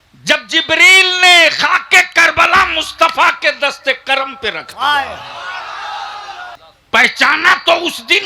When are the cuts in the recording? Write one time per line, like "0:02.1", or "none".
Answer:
0:06.6